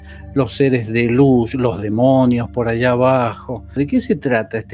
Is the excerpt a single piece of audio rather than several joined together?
no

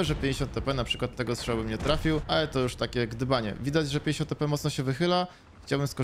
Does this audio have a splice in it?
no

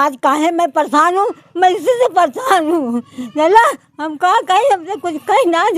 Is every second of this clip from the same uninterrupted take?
yes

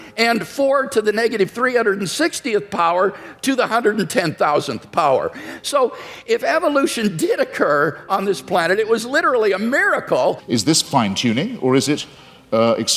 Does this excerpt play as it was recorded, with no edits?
no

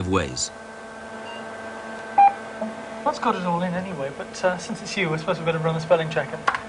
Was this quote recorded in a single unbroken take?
yes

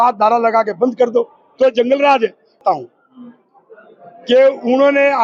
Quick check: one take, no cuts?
no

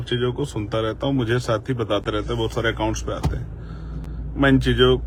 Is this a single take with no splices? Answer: yes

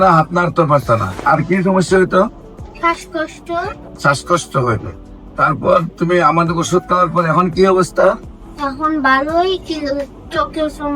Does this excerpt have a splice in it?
yes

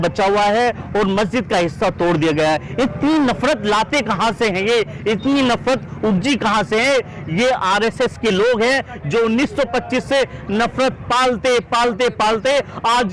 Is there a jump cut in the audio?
no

